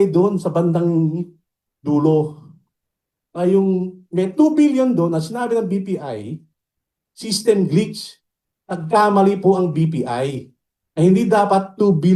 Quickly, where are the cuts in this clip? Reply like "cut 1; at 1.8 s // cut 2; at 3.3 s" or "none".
none